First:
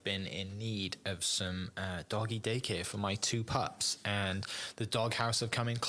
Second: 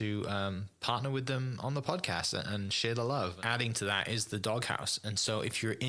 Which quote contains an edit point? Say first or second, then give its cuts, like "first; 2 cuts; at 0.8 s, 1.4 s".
second; 1 cut; at 3.4 s